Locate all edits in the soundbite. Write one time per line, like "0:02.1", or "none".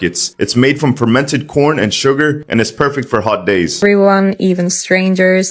0:03.8